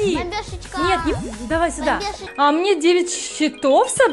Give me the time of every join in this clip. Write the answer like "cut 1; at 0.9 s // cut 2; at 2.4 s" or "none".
cut 1; at 2.2 s